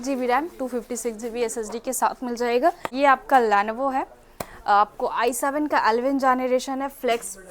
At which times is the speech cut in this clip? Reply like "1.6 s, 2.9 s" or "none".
2.9 s